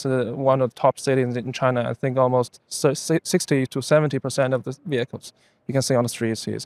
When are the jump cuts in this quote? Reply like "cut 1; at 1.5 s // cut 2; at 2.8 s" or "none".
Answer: none